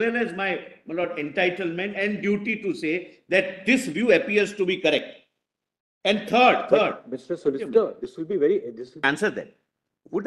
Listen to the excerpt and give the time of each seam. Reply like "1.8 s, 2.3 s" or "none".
9.0 s